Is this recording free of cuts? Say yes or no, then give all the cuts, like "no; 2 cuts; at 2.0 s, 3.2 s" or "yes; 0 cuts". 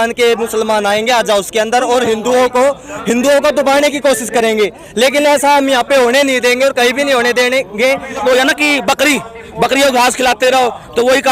no; 1 cut; at 8.2 s